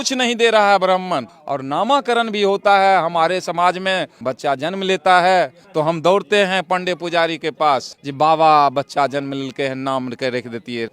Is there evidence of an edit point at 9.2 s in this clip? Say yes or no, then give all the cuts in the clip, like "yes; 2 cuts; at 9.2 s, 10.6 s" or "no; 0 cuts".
no; 4 cuts; at 1.3 s, 4.2 s, 5.6 s, 8.0 s